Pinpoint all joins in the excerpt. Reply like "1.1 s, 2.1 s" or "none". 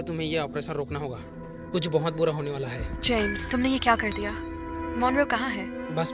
none